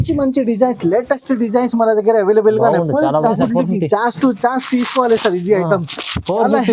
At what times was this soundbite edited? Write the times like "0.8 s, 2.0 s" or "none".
3.3 s

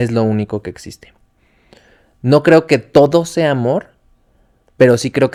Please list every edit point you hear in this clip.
none

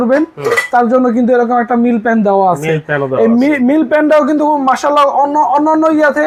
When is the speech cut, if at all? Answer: none

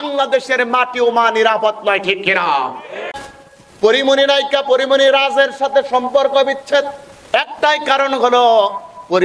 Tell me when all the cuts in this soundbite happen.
3.1 s

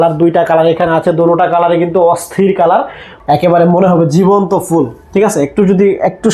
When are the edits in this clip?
3.1 s

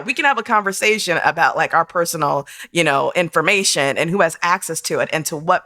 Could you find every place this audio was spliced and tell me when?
none

